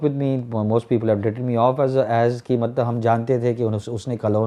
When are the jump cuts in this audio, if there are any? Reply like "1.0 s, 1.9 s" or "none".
none

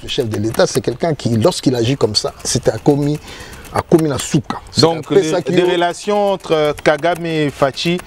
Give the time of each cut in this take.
none

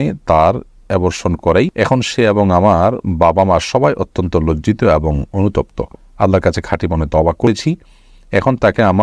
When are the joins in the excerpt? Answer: 1.7 s, 7.5 s

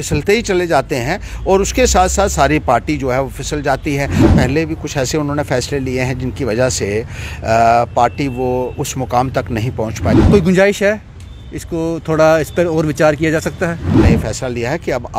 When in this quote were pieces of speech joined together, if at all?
4.2 s, 10.1 s, 14.0 s

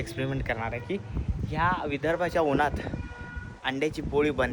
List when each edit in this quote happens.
none

